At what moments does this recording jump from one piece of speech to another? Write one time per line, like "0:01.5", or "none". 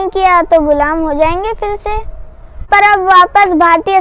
none